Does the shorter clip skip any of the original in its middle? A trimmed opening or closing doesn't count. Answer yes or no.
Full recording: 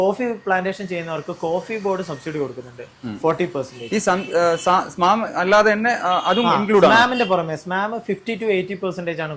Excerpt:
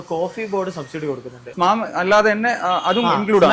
yes